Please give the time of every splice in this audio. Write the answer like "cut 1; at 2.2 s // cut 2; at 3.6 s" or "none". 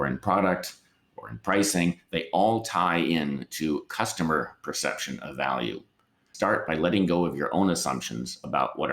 cut 1; at 6.3 s